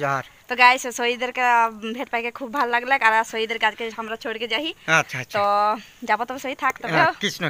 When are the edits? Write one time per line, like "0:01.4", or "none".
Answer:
none